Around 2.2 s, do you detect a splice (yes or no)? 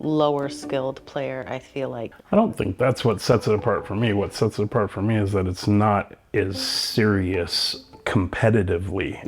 yes